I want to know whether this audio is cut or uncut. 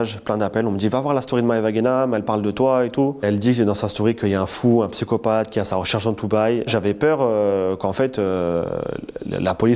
cut